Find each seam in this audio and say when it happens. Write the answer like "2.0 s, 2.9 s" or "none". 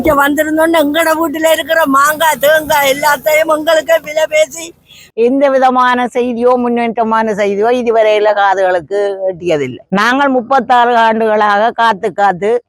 5.0 s, 9.8 s